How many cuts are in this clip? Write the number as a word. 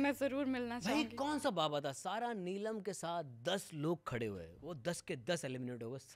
zero